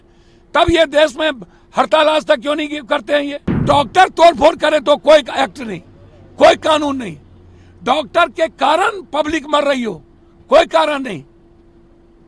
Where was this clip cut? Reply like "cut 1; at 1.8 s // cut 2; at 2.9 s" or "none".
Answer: cut 1; at 3.6 s